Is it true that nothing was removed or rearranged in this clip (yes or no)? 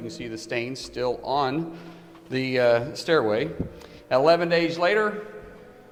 yes